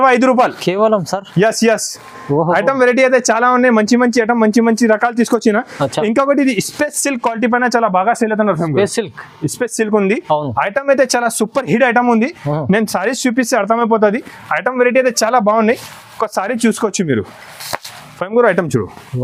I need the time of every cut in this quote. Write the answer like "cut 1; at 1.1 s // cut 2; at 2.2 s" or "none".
none